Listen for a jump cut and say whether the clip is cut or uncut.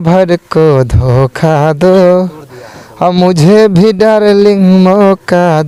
uncut